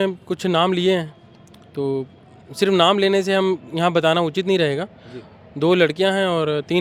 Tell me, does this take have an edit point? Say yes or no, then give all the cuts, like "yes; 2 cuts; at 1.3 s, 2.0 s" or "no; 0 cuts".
no; 0 cuts